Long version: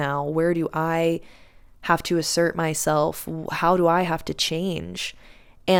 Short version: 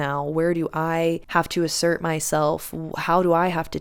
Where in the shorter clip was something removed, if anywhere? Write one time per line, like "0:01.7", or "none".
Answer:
0:01.2